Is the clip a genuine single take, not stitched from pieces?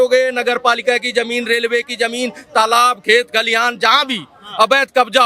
yes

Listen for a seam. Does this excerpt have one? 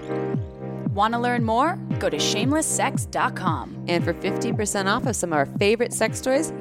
yes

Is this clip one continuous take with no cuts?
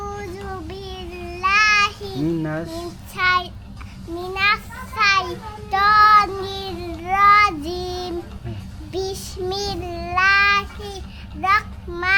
yes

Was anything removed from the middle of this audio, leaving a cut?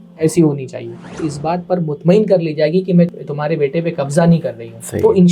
yes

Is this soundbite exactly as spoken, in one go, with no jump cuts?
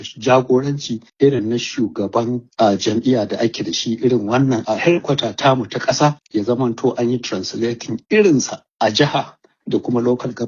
no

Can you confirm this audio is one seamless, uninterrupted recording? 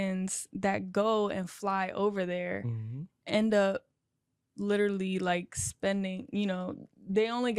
yes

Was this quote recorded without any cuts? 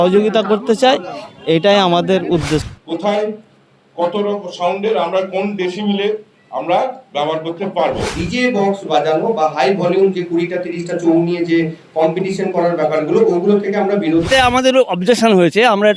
no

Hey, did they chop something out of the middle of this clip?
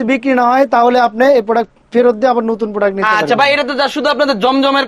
no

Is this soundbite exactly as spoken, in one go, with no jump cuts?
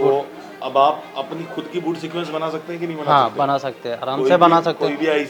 yes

